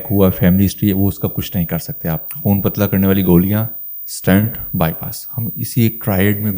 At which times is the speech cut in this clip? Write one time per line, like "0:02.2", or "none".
0:02.3